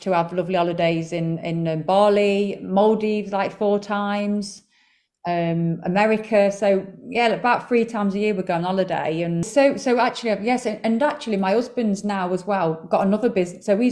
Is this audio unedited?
no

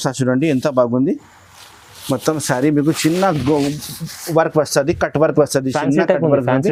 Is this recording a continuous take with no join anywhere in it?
yes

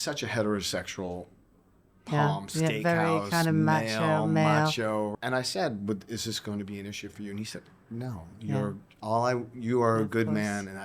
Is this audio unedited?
no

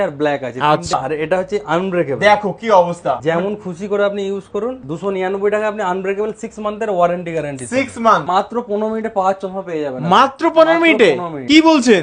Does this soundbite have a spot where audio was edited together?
yes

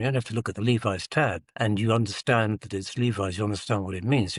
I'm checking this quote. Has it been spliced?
no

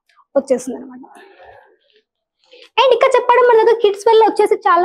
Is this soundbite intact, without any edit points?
yes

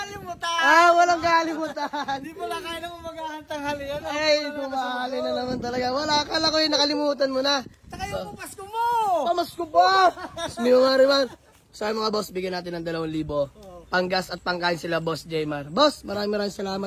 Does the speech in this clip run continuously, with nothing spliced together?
yes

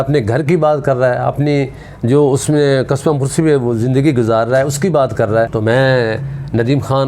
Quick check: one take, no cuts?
no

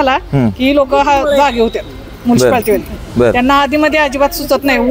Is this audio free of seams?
yes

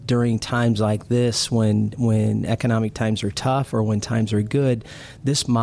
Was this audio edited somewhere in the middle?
no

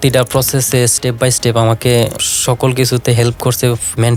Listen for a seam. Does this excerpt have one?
no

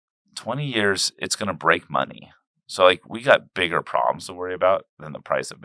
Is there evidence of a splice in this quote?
no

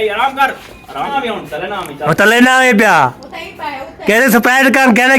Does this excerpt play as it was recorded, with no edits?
no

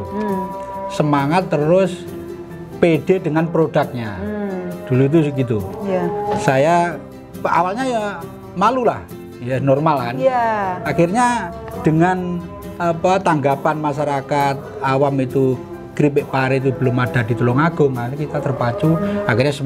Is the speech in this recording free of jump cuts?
yes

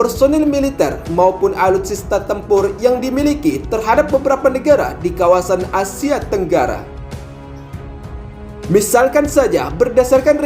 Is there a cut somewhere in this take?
yes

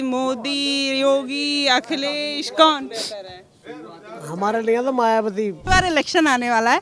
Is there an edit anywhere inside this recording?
yes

